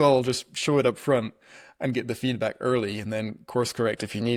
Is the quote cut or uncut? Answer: uncut